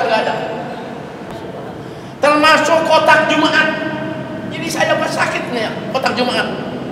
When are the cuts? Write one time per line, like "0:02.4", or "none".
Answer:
0:01.4